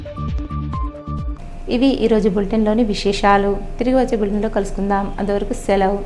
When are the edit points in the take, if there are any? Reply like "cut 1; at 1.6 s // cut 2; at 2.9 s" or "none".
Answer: none